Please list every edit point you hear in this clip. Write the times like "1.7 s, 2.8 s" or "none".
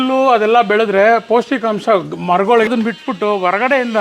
2.7 s